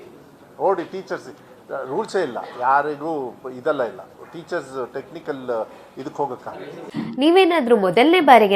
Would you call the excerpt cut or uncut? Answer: cut